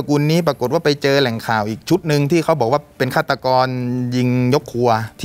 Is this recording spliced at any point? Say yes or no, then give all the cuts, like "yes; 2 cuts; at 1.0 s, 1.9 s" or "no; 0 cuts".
no; 0 cuts